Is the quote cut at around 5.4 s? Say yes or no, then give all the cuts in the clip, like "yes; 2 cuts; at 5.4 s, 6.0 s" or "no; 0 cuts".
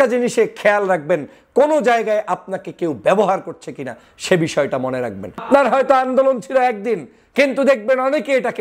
yes; 1 cut; at 5.4 s